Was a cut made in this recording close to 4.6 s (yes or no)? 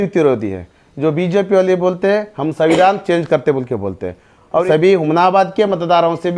yes